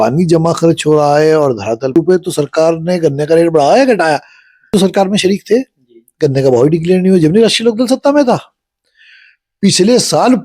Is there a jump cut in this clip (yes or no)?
yes